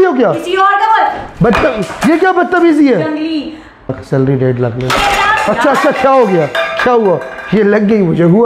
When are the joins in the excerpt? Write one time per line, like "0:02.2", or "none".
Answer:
0:04.0